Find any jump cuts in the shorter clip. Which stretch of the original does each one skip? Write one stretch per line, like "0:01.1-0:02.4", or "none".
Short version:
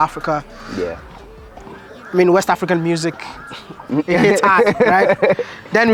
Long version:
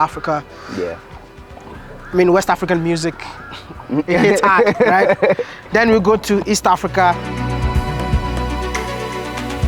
none